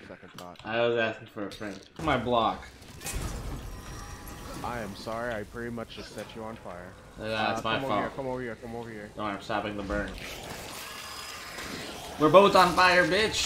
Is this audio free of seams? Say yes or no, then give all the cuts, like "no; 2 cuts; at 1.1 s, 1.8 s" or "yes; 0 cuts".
no; 2 cuts; at 2.0 s, 10.2 s